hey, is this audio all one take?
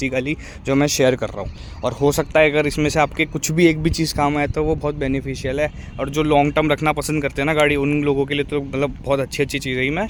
yes; 0 cuts

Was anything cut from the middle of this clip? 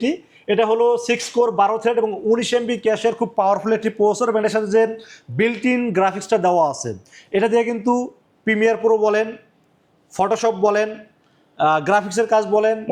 no; 0 cuts

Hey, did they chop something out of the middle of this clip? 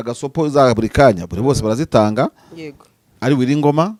no; 0 cuts

